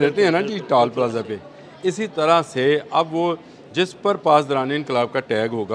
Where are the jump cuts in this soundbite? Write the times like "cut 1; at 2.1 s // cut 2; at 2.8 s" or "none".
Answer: none